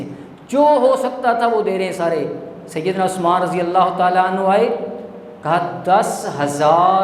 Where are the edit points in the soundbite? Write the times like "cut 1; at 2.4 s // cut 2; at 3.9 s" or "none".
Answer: none